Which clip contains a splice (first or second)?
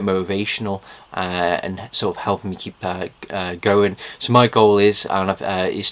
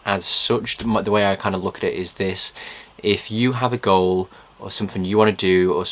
second